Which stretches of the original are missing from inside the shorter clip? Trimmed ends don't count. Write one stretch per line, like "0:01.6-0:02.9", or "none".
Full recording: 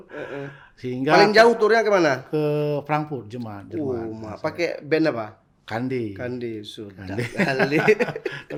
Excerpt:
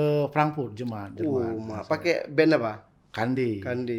none